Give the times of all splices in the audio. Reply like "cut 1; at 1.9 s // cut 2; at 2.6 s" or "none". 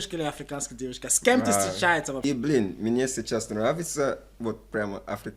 cut 1; at 2.2 s